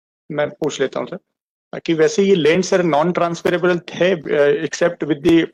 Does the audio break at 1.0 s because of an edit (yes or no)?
no